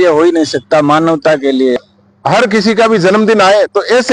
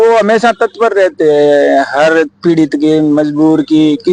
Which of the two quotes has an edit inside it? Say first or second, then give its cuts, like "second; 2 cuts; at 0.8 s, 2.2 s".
first; 1 cut; at 1.8 s